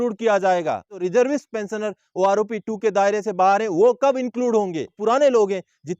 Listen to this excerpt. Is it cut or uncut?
cut